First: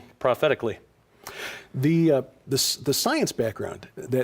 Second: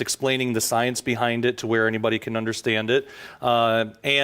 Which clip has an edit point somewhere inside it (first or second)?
second